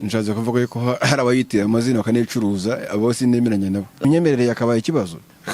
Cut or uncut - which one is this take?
cut